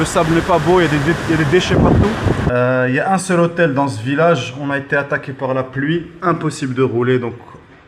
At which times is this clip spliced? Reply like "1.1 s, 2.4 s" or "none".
2.4 s